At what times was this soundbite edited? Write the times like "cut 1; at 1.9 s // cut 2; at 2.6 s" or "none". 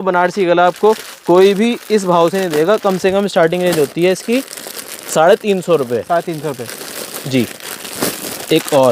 none